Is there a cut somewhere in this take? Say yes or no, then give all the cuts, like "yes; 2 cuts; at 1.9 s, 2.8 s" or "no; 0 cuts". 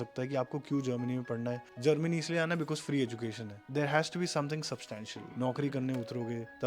yes; 3 cuts; at 1.7 s, 3.6 s, 5.2 s